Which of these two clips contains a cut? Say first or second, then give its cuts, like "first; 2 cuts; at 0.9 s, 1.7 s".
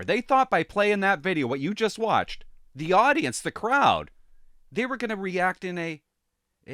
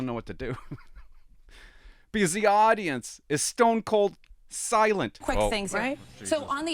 second; 1 cut; at 5.2 s